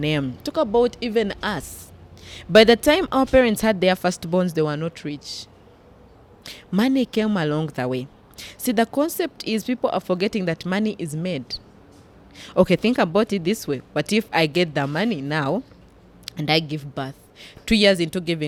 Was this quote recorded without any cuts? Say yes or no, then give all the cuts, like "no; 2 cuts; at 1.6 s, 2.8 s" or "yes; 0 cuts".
yes; 0 cuts